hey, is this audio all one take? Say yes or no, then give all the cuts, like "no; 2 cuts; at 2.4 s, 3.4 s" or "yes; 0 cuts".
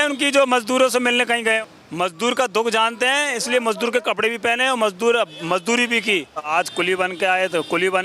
no; 2 cuts; at 1.6 s, 6.5 s